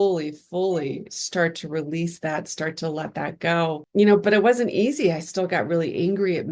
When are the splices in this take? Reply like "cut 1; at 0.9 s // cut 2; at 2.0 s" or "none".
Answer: none